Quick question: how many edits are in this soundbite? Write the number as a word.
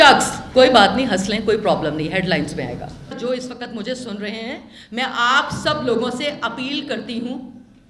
one